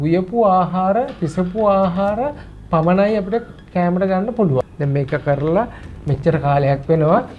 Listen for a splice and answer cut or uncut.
cut